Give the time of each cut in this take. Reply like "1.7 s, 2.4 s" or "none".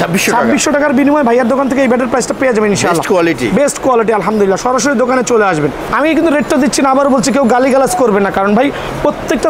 5.8 s